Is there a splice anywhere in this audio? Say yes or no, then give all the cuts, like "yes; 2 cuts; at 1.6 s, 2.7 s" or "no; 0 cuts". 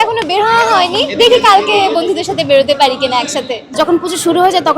yes; 1 cut; at 3.7 s